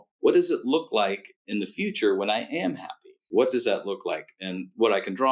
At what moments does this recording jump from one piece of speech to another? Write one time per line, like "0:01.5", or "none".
0:03.2

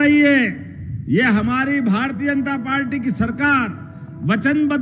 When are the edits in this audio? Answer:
none

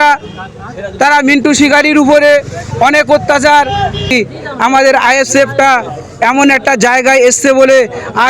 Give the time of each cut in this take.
0:04.1

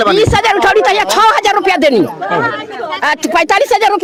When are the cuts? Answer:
none

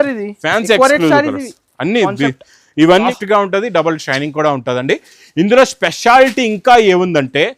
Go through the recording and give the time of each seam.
0:03.1

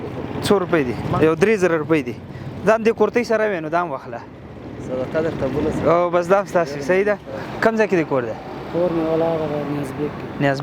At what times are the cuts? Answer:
0:01.0
0:07.4

